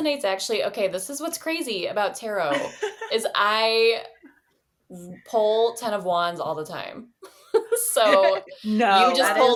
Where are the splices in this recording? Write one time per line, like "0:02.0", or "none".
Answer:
none